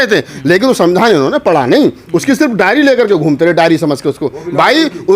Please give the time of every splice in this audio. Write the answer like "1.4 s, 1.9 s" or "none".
none